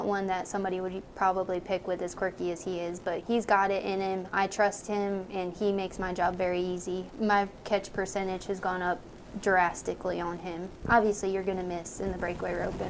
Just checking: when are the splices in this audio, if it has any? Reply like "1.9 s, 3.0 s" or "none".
3.2 s, 7.1 s, 10.8 s